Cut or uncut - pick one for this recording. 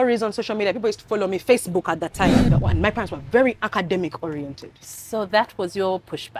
cut